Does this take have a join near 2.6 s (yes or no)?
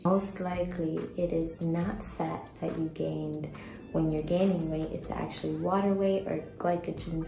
no